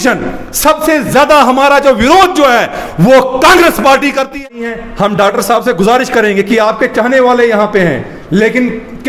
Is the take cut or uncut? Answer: cut